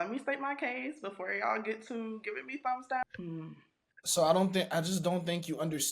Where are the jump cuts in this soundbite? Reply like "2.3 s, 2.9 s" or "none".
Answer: 3.0 s